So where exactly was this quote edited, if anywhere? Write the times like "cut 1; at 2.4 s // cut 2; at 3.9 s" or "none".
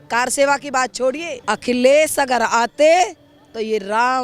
cut 1; at 1.3 s